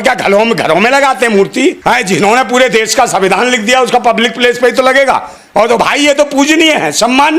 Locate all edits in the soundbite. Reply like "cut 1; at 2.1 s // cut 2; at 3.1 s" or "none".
cut 1; at 1.8 s // cut 2; at 5.4 s